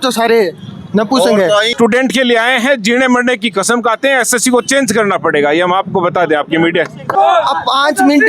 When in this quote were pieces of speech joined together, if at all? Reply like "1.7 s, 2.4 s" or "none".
1.7 s, 7.1 s